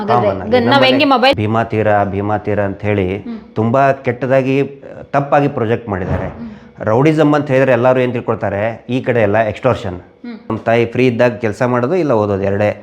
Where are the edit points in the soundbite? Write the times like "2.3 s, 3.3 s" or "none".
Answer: 1.4 s, 10.5 s